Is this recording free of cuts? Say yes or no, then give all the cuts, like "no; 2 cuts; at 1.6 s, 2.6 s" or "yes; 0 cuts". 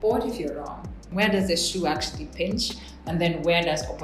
no; 1 cut; at 1.0 s